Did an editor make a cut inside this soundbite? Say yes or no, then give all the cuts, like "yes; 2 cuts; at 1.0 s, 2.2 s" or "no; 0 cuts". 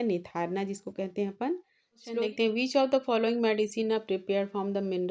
yes; 1 cut; at 2.1 s